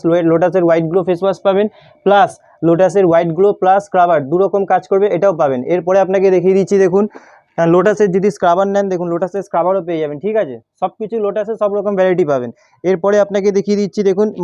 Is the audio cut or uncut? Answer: uncut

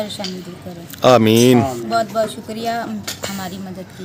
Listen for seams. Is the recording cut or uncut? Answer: uncut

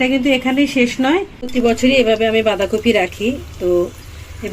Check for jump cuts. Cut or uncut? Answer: cut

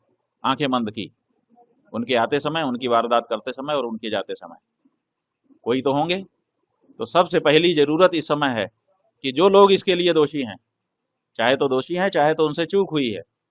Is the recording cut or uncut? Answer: uncut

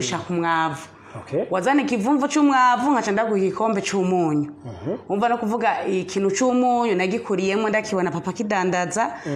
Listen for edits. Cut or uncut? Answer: uncut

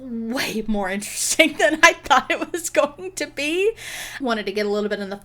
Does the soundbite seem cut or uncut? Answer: cut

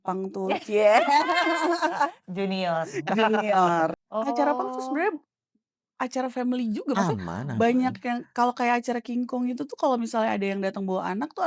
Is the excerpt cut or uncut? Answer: cut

